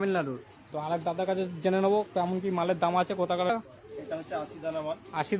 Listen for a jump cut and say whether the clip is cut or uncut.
cut